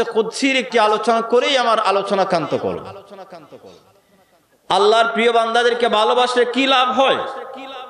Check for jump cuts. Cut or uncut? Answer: uncut